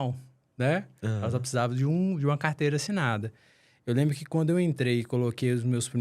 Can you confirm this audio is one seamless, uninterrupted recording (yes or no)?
yes